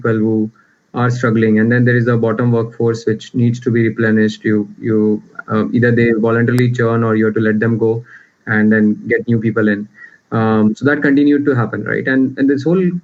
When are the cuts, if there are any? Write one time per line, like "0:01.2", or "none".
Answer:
none